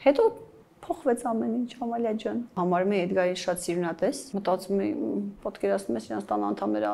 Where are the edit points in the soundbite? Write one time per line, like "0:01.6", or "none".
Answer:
0:02.6
0:04.3

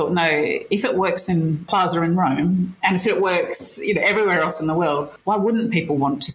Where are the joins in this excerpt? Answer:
0:01.6
0:05.1

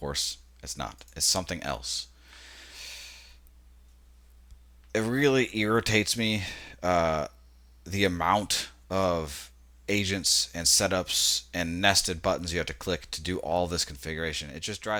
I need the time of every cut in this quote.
none

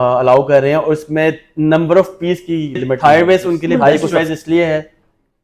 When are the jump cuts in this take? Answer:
0:03.0

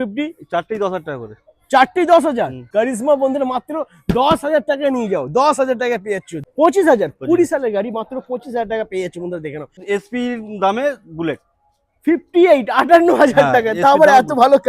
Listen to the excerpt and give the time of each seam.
0:02.6
0:06.4
0:09.7

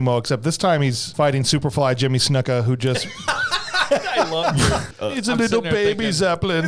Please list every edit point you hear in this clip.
0:01.0
0:04.9

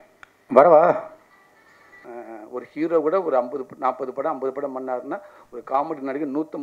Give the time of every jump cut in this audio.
0:02.0

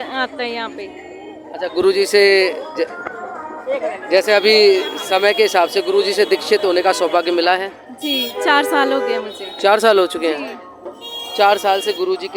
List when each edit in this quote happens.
none

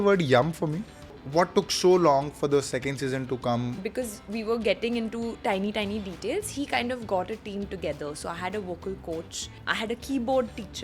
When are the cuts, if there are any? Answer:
0:01.2
0:03.8
0:09.6

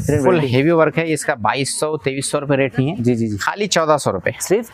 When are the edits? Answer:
none

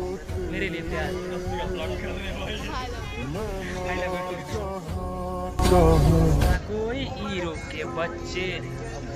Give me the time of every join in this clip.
0:06.6

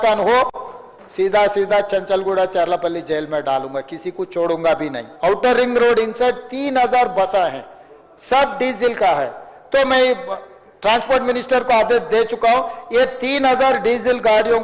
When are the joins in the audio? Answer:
0:05.0

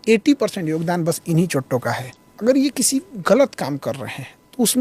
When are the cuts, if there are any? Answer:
0:02.1

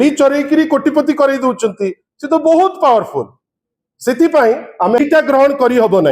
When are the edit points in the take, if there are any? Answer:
0:05.2

